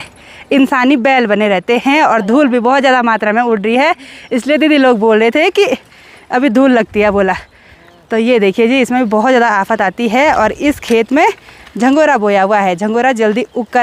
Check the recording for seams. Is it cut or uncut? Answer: uncut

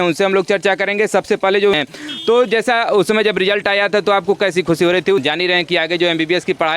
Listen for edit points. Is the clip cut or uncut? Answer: cut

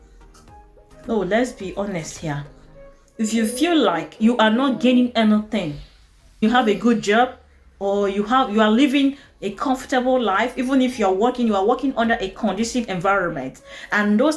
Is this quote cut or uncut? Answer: cut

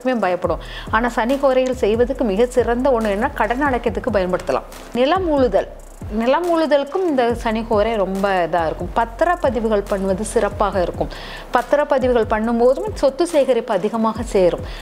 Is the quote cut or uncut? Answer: cut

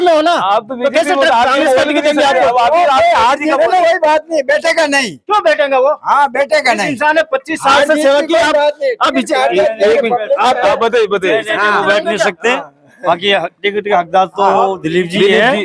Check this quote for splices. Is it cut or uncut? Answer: uncut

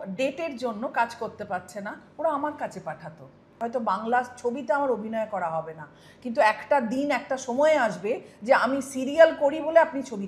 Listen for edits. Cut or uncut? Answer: cut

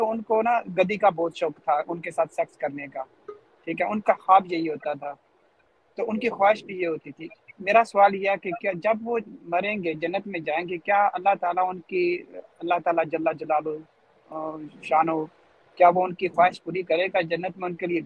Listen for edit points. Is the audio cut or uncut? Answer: uncut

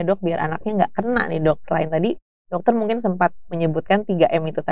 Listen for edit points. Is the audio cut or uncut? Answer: uncut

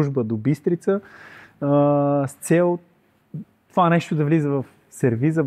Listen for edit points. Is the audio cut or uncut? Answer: uncut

